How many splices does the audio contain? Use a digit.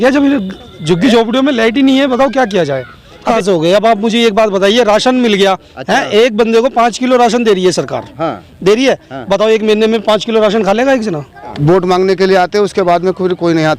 2